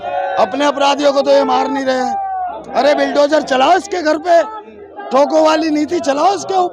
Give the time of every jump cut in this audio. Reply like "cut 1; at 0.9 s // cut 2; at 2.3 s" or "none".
none